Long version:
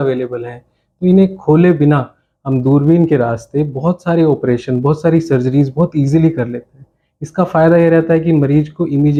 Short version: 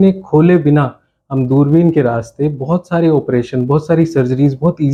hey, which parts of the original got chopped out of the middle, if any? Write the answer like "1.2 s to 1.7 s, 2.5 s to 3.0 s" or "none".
none